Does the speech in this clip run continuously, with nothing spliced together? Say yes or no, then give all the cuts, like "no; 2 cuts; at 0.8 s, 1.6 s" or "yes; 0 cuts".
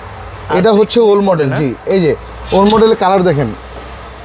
yes; 0 cuts